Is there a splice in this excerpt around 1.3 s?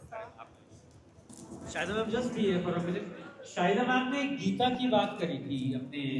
yes; 1 cut; at 1.3 s

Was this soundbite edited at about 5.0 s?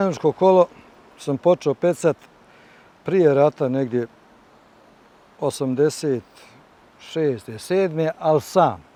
no; 0 cuts

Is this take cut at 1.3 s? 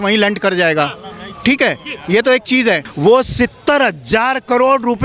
no; 1 cut; at 2.9 s

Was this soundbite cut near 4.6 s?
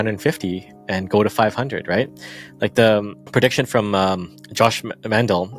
no; 1 cut; at 3.2 s

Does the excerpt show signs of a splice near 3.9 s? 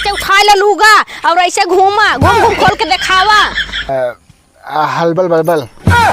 yes; 1 cut; at 3.9 s

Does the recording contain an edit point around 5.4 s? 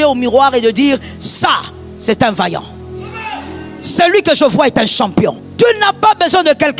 yes; 1 cut; at 5.4 s

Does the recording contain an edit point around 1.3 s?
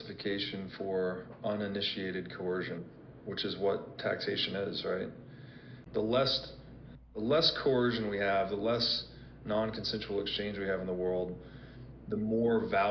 no; 1 cut; at 5.8 s

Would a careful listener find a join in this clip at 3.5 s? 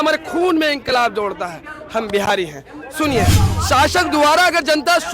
yes; 1 cut; at 3.5 s

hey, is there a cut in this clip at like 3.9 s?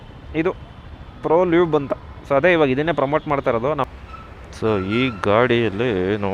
yes; 1 cut; at 3.9 s

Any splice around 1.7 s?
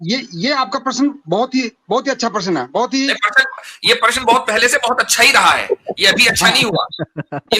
no; 0 cuts

